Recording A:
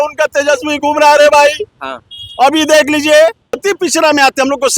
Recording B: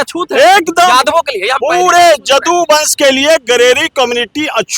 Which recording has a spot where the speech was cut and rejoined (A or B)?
A